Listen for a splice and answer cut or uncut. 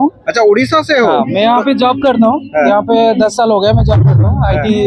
uncut